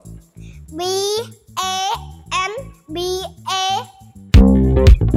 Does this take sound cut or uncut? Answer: cut